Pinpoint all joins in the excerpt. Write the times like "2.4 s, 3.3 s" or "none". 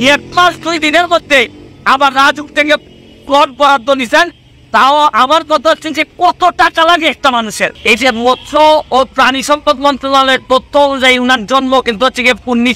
7.7 s